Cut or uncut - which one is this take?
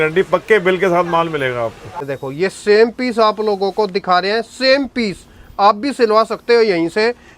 cut